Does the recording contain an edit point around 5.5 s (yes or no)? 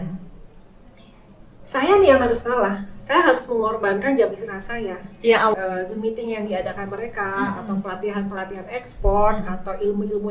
yes